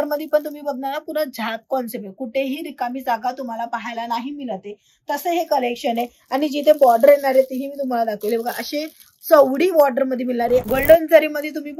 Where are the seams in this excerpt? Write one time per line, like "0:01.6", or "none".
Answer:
0:10.7